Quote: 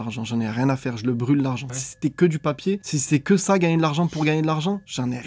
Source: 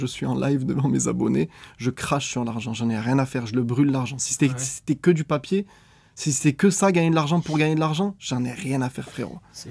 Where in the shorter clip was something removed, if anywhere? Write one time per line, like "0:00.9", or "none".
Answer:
0:01.8
0:02.9